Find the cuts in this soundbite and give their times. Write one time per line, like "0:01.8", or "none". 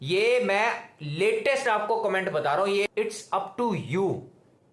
0:02.9